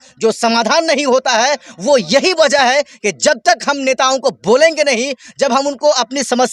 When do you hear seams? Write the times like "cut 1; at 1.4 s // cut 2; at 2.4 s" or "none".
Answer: none